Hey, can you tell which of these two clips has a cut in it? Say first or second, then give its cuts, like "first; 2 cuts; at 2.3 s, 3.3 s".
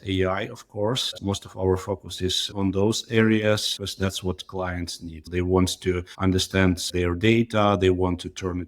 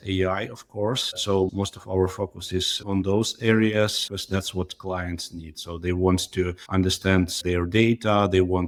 first; 2 cuts; at 1.2 s, 5.2 s